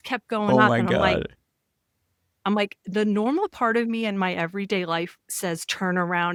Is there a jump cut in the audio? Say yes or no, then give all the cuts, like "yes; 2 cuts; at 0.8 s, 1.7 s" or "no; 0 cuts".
no; 0 cuts